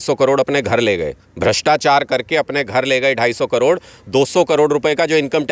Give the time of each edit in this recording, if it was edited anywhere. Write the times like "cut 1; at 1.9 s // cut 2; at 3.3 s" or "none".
none